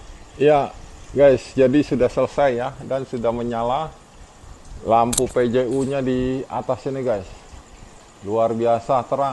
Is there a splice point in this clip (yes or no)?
no